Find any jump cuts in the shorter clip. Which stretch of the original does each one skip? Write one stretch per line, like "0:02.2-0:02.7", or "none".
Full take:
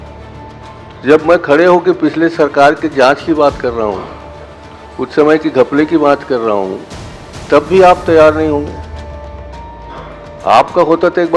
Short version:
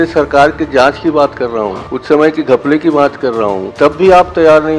0:04.1-0:04.9
0:06.7-0:07.4

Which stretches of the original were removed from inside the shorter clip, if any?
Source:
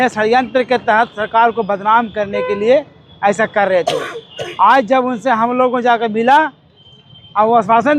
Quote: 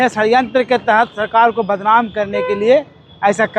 none

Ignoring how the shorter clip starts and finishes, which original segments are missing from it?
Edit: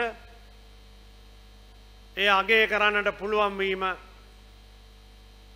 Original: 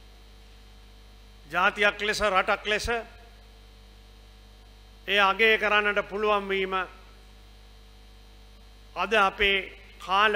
none

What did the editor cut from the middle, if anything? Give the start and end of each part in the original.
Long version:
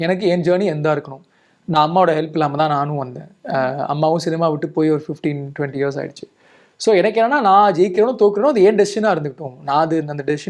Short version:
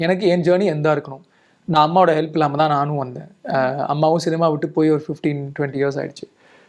none

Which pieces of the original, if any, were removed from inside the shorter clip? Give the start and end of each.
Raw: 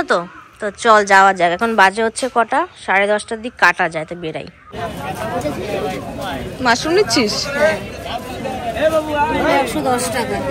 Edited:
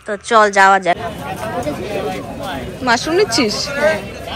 0:01.5-0:04.7

